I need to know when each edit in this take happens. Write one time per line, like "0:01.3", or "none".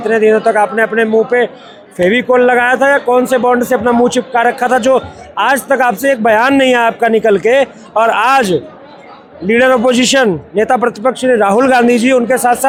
none

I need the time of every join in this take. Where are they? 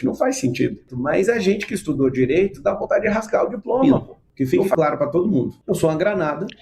0:00.9
0:04.2
0:05.6

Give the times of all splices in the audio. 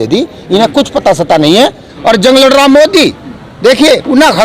0:01.9

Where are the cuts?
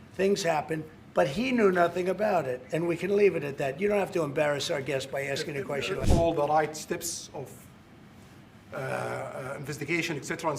0:06.0

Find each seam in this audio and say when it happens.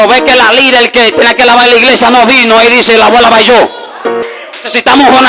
0:04.3

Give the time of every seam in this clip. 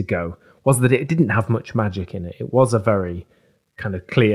none

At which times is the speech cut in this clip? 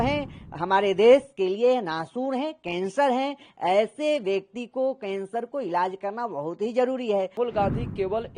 0:07.4

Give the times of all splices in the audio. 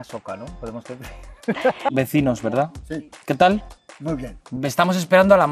0:01.9

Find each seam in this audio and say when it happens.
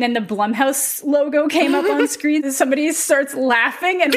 0:02.5

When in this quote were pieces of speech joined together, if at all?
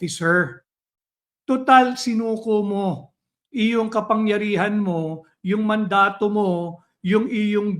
none

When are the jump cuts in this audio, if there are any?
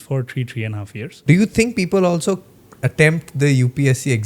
0:01.1

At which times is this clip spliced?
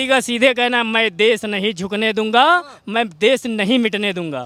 none

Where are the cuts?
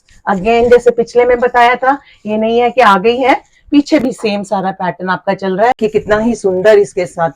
0:05.8

